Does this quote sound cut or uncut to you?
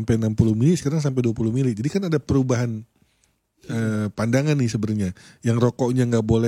uncut